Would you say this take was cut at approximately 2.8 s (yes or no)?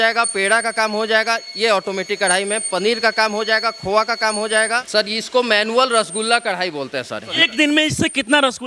no